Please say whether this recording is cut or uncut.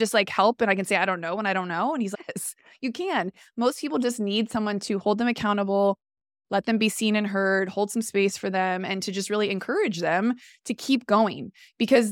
uncut